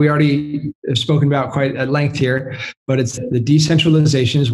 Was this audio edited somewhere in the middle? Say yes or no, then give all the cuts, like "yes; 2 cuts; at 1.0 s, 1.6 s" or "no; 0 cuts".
no; 0 cuts